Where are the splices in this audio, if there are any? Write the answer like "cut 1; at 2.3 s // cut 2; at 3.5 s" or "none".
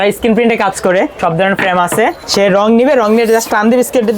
cut 1; at 1.1 s // cut 2; at 2.2 s